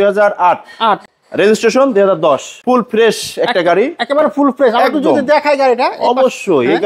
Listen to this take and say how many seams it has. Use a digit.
2